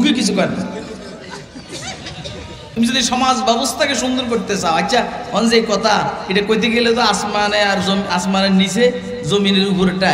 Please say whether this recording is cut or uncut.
cut